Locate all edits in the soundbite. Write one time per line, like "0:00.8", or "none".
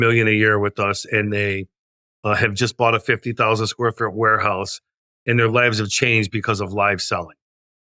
none